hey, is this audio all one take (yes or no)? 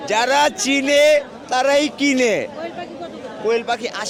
yes